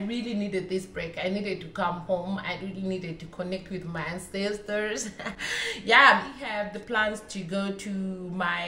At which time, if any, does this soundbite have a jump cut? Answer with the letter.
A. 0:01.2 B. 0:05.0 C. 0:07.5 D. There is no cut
D